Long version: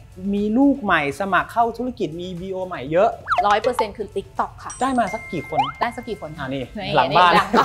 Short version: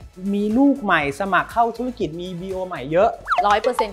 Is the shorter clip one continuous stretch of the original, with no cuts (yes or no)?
yes